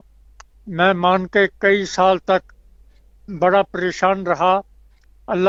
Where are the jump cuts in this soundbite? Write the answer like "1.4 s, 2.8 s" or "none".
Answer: none